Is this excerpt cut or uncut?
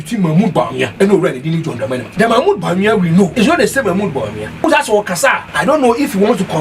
cut